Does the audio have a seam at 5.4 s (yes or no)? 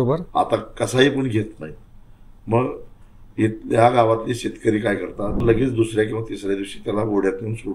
yes